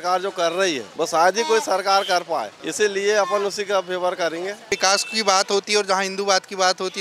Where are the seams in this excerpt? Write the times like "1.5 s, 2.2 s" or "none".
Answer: 0.8 s, 2.6 s, 4.7 s